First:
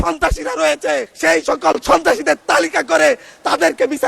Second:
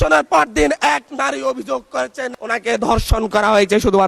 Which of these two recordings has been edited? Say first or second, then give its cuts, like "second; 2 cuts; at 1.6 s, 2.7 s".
first; 1 cut; at 1.1 s